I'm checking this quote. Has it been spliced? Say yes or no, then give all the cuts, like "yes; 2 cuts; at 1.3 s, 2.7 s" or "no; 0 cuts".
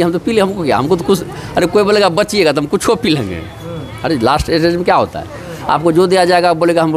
no; 0 cuts